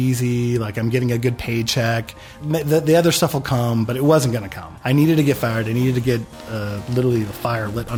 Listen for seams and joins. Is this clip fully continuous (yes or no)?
yes